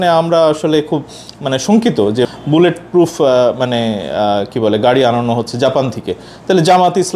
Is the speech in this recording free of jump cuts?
no; 1 cut; at 2.3 s

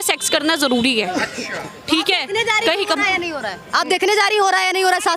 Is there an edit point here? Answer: yes; 1 cut; at 1.7 s

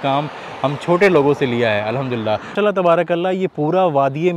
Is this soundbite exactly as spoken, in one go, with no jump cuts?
no; 1 cut; at 2.4 s

